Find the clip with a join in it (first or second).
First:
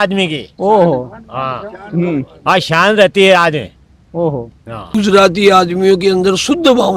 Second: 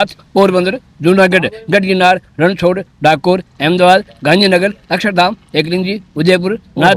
first